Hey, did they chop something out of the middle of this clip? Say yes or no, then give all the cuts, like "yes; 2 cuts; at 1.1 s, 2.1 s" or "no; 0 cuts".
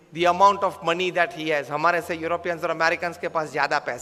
no; 0 cuts